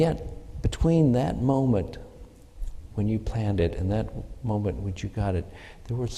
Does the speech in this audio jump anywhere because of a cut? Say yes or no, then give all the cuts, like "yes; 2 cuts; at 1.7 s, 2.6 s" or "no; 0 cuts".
no; 0 cuts